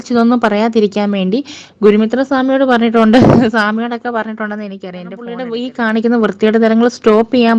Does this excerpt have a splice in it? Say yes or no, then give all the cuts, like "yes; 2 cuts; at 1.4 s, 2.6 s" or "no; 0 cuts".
yes; 1 cut; at 5.4 s